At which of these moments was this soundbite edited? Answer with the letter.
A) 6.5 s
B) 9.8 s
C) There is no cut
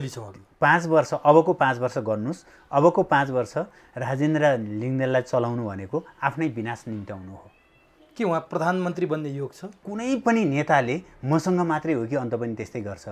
B